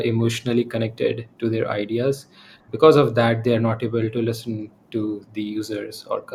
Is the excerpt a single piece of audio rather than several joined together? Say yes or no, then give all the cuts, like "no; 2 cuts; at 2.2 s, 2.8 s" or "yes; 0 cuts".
yes; 0 cuts